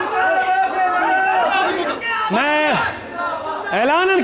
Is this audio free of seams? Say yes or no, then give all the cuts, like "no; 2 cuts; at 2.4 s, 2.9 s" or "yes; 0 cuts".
no; 1 cut; at 1.5 s